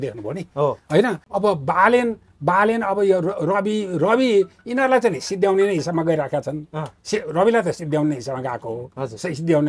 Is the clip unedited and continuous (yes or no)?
no